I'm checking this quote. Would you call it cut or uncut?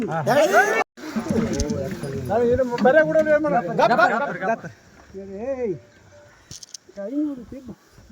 cut